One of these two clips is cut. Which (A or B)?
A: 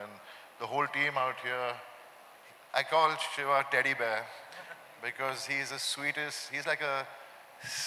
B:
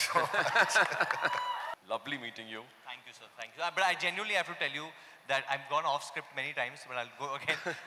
B